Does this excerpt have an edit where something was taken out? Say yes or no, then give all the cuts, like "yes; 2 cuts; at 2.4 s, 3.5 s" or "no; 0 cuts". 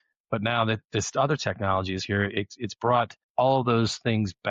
yes; 1 cut; at 3.2 s